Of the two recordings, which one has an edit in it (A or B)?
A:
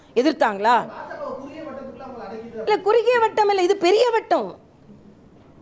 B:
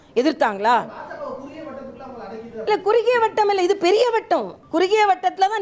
B